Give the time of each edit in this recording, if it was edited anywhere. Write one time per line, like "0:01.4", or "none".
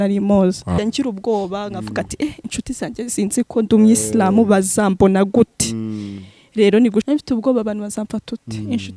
0:00.8
0:07.1